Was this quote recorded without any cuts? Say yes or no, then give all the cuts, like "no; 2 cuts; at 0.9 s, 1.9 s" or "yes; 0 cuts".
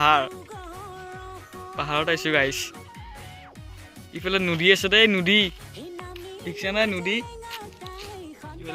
yes; 0 cuts